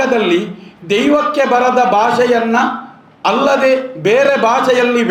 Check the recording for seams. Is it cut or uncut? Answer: uncut